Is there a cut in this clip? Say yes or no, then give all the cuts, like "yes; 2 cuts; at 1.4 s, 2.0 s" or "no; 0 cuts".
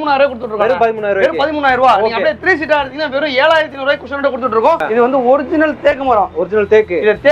yes; 1 cut; at 4.8 s